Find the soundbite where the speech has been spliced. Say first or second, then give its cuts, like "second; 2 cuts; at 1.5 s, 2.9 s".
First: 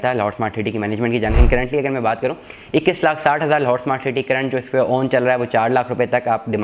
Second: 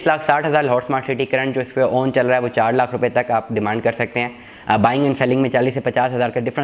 first; 1 cut; at 1.4 s